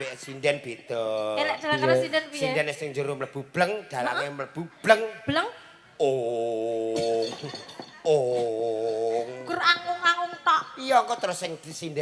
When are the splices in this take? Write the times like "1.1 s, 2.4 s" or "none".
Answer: none